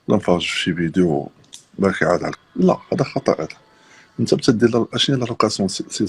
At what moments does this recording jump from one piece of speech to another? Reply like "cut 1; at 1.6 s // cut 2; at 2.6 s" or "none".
cut 1; at 2.4 s